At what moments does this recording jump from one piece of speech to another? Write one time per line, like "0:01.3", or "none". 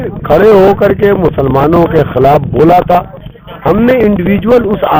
none